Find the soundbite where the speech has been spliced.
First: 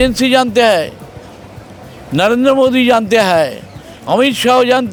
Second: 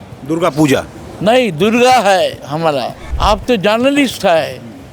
second; 1 cut; at 3.0 s

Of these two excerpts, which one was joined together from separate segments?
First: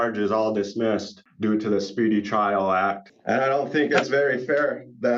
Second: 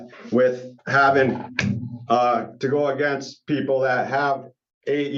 first; 2 cuts; at 1.2 s, 3.1 s

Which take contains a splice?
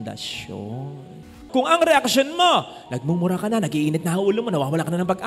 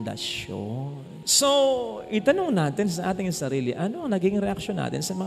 first; 1 cut; at 1.4 s

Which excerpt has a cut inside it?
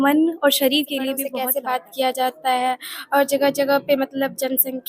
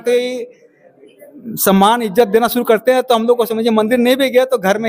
first; 1 cut; at 1.2 s

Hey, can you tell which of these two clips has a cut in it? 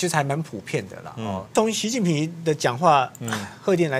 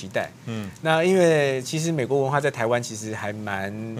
first; 1 cut; at 1.5 s

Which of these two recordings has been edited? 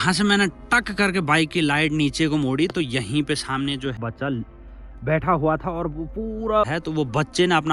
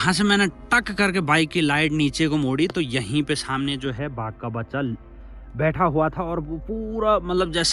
first; 2 cuts; at 4.0 s, 6.7 s

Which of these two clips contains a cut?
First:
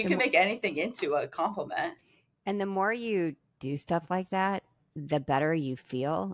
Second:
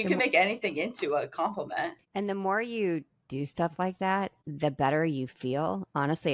second; 2 cuts; at 2.0 s, 4.4 s

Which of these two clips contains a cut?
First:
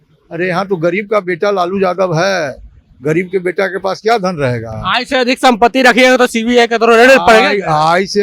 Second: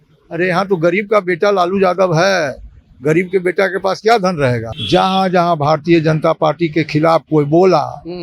second; 1 cut; at 4.7 s

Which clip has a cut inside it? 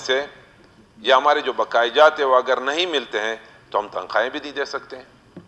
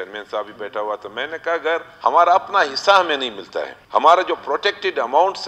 second; 2 cuts; at 1.9 s, 3.8 s

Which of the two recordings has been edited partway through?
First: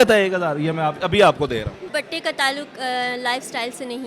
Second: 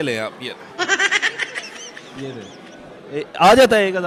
first; 1 cut; at 1.8 s

